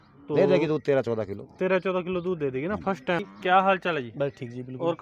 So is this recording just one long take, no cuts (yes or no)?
no